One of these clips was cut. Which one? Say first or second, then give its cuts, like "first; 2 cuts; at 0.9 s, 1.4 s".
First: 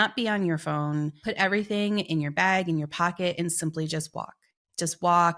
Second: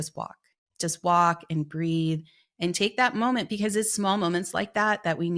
first; 1 cut; at 1.2 s